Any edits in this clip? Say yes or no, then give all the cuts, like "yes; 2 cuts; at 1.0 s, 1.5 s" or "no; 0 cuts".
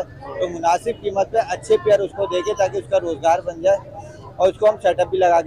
no; 0 cuts